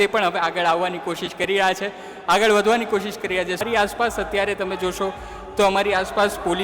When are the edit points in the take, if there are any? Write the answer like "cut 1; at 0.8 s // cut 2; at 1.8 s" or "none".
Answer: cut 1; at 3.6 s